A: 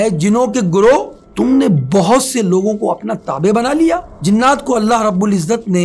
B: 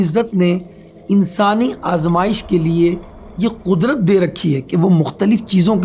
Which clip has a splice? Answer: A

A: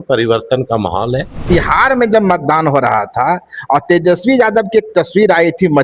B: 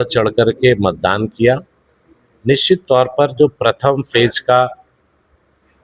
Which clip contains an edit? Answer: A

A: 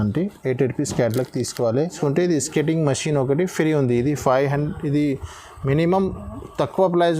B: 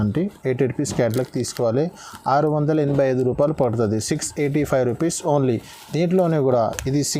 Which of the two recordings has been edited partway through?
A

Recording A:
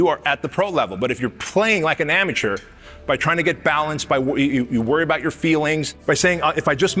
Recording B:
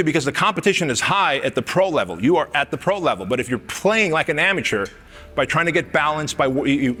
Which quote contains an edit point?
A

